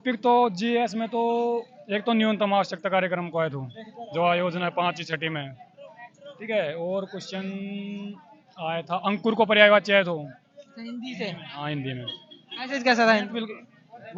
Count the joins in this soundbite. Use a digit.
0